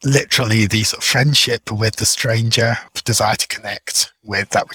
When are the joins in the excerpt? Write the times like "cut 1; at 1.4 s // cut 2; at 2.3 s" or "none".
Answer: cut 1; at 2.9 s